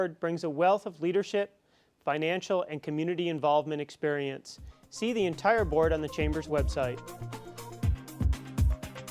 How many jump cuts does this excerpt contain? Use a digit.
1